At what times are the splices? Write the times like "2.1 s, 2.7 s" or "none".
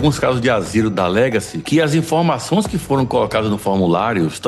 0.9 s